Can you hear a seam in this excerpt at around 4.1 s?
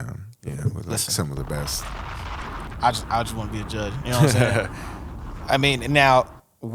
no; 1 cut; at 2.5 s

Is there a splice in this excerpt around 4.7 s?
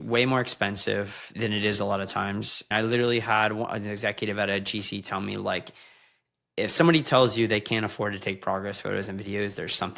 no; 2 cuts; at 1.3 s, 2.7 s

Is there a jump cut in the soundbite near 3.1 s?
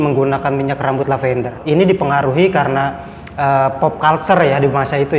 no; 1 cut; at 1.6 s

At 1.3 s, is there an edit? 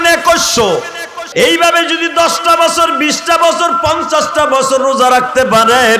yes; 1 cut; at 1.3 s

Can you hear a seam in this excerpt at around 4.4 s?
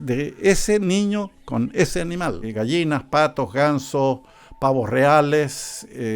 no; 1 cut; at 2.4 s

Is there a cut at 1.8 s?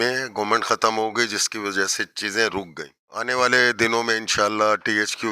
no; 1 cut; at 3.3 s

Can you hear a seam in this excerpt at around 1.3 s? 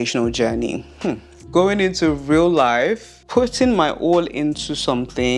yes; 2 cuts; at 1.3 s, 3.1 s

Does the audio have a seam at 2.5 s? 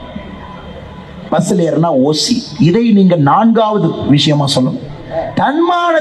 no; 0 cuts

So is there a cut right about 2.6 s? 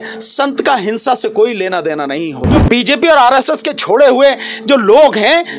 yes; 1 cut; at 2.6 s

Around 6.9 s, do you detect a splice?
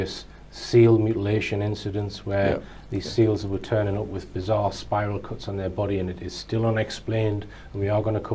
no; 1 cut; at 1.2 s

